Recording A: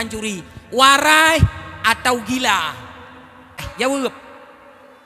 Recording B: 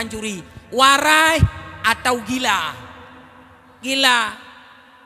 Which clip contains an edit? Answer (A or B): A